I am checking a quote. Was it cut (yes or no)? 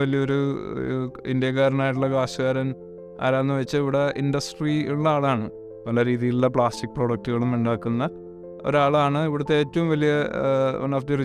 no